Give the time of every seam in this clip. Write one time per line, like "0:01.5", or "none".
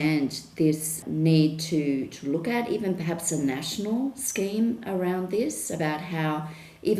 0:01.0